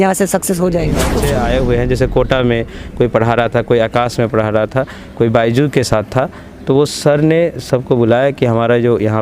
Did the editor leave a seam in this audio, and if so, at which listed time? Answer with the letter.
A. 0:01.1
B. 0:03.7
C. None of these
A